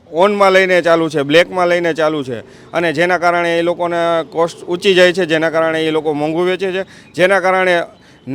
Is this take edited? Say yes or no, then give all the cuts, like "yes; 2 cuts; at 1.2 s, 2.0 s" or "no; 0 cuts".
no; 0 cuts